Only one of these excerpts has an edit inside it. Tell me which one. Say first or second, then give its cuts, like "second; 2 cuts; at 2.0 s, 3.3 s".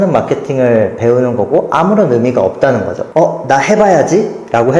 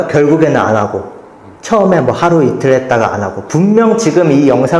first; 1 cut; at 3.0 s